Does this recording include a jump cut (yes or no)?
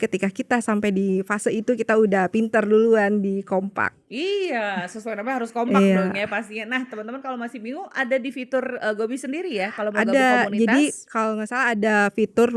no